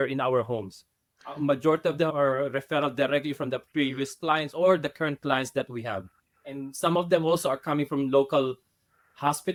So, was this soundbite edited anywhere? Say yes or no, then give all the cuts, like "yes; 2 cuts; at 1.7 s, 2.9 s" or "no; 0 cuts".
no; 0 cuts